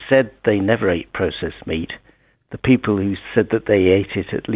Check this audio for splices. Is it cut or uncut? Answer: cut